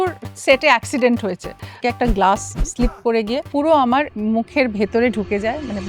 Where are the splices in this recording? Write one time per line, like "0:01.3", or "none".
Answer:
0:01.7